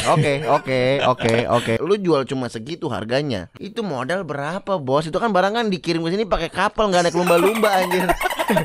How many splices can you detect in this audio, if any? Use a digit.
2